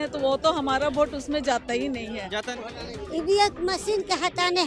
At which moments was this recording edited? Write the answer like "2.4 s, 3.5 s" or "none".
2.5 s